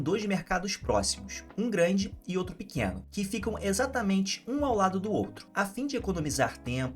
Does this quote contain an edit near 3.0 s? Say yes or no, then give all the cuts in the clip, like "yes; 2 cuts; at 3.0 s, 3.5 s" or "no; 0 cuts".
yes; 2 cuts; at 3.0 s, 5.4 s